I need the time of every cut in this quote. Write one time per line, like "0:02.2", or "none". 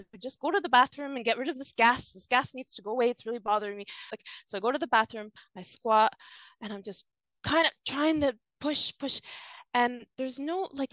0:04.2